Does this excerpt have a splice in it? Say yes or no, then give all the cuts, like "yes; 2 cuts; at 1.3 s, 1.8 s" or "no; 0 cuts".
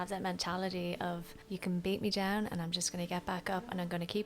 yes; 1 cut; at 1.3 s